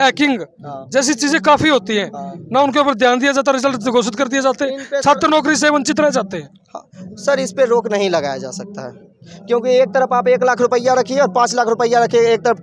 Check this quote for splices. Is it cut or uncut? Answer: uncut